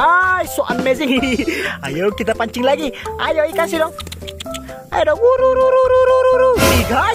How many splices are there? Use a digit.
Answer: 1